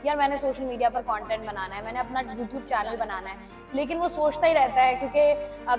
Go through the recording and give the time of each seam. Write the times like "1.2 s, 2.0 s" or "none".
none